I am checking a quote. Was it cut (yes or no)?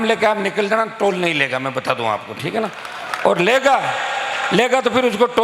no